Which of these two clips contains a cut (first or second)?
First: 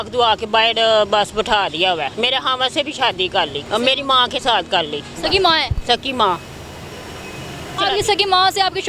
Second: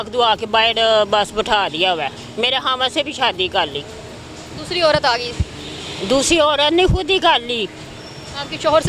first